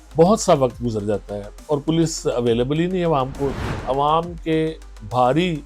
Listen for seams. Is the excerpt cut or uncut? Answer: cut